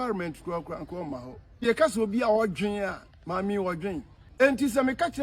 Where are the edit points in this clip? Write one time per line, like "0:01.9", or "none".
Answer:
0:01.6
0:04.2